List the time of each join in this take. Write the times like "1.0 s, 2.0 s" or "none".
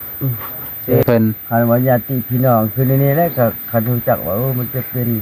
1.0 s